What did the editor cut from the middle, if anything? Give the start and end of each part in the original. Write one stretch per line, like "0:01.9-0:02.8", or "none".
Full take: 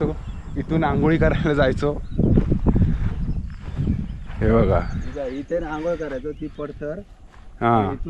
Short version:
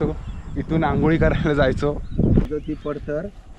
0:02.5-0:06.2

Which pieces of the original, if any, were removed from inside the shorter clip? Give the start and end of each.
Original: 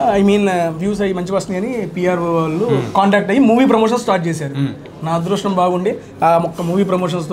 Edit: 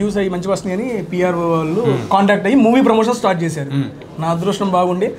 none

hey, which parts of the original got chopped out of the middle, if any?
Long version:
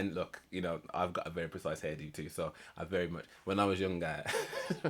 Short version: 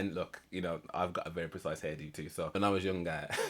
0:02.5-0:03.5

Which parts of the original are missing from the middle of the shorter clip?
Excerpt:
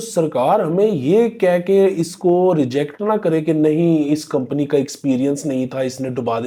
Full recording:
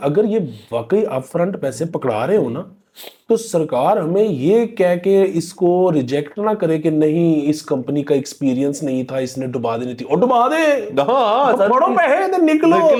none

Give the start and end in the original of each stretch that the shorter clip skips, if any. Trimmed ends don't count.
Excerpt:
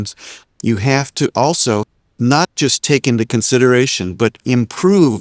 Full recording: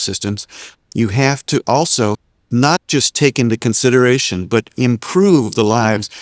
none

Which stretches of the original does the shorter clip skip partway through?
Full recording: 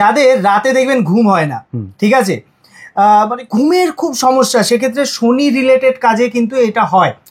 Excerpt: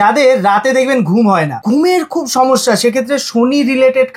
0:01.6-0:03.4

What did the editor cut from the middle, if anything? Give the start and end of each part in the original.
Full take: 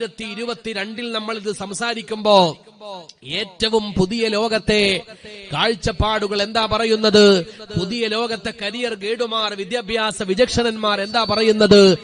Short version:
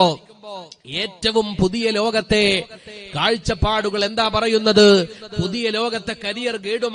none

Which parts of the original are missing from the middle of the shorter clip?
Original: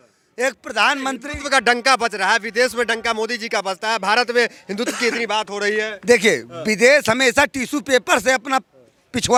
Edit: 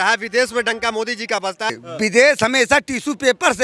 0:04.0-0:06.4

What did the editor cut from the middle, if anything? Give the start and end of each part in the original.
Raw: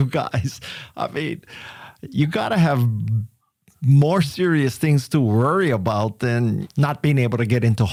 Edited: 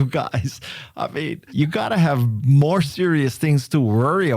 0:01.4-0:02.0
0:02.9-0:03.7

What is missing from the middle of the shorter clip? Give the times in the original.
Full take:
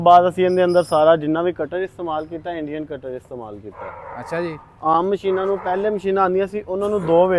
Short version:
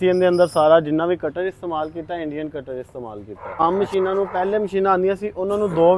0:04.0-0:04.9

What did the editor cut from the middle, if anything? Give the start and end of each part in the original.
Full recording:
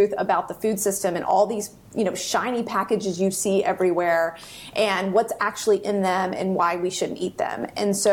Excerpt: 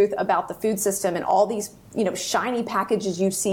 none

